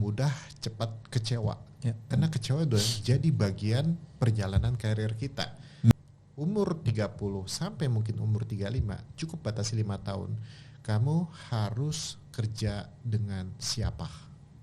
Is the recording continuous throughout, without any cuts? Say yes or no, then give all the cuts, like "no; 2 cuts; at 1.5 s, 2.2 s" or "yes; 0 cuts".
no; 1 cut; at 5.9 s